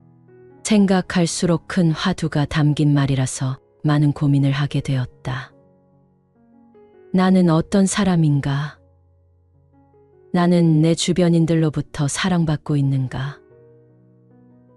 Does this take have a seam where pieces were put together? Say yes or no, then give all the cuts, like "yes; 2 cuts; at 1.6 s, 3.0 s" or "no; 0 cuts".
yes; 2 cuts; at 5.5 s, 7.0 s